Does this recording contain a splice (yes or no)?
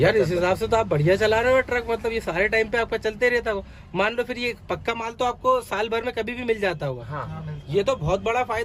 no